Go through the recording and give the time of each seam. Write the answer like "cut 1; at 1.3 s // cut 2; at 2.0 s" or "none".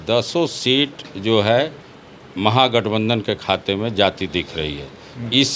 none